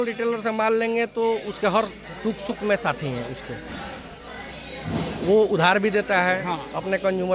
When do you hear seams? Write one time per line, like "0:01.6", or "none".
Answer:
none